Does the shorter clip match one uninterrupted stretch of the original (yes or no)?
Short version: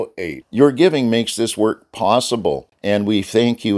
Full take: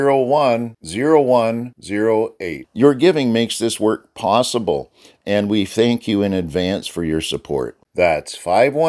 no